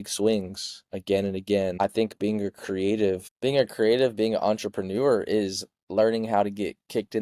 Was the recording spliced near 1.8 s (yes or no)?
yes